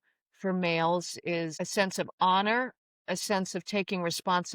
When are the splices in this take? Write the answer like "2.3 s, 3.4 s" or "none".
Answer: 1.6 s